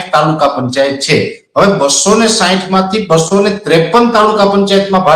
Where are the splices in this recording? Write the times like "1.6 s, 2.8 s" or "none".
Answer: none